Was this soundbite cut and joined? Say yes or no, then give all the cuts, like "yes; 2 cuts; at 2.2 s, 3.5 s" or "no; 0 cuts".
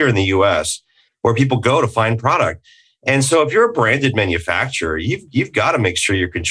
no; 0 cuts